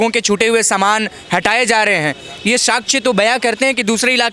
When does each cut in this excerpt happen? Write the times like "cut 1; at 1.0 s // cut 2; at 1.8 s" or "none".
none